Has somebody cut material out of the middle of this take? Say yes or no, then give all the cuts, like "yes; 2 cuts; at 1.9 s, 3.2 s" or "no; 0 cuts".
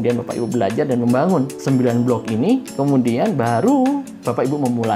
yes; 3 cuts; at 1.6 s, 2.7 s, 4.1 s